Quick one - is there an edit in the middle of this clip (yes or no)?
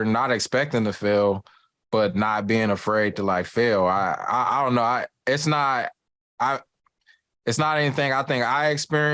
no